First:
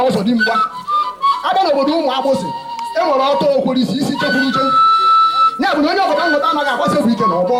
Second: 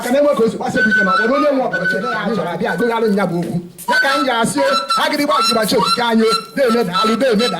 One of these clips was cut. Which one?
second; 1 cut; at 2.2 s

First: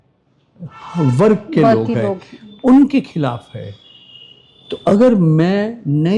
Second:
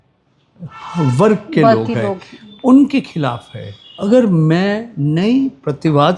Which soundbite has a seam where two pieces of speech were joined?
second; 1 cut; at 4.0 s

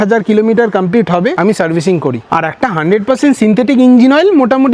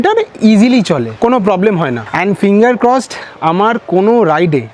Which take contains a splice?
first; 1 cut; at 2.2 s

